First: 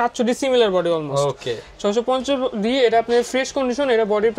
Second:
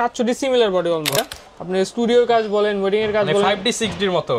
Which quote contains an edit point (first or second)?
second